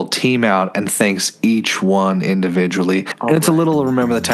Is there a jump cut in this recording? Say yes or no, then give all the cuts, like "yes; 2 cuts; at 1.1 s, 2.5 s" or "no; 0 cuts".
yes; 1 cut; at 3.1 s